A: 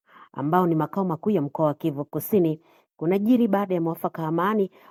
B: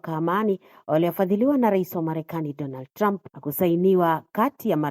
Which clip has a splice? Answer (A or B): B